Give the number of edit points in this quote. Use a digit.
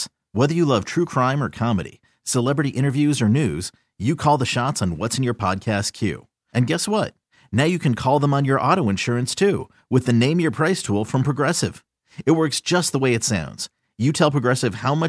0